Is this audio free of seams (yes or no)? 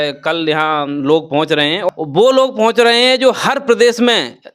yes